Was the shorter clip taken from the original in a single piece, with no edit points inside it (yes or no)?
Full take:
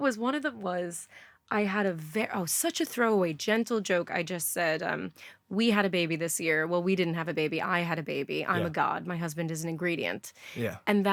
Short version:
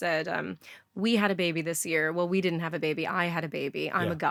yes